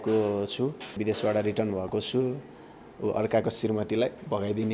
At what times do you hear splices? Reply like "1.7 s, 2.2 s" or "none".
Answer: 1.0 s